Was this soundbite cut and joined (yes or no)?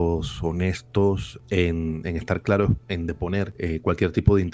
yes